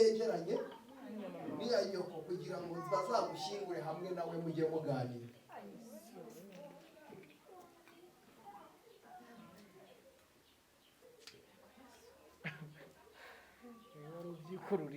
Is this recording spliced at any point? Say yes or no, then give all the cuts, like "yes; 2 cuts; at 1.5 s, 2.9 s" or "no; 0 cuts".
no; 0 cuts